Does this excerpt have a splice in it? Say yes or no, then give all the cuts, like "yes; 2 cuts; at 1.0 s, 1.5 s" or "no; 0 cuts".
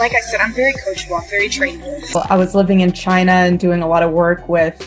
yes; 1 cut; at 2.0 s